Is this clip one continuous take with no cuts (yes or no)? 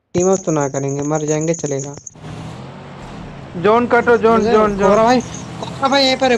no